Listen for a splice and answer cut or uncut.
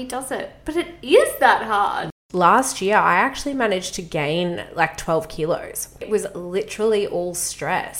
cut